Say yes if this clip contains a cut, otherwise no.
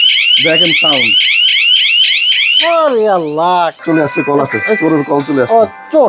yes